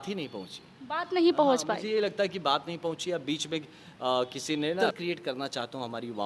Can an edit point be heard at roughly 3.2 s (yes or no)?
no